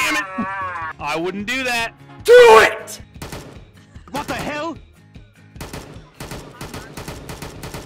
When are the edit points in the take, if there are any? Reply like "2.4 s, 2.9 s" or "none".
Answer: 0.9 s